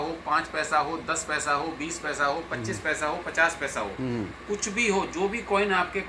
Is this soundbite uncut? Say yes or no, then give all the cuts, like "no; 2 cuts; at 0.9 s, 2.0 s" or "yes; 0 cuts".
yes; 0 cuts